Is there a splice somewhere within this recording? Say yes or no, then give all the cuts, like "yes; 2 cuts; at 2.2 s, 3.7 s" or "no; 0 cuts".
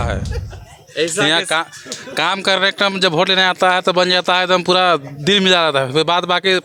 no; 0 cuts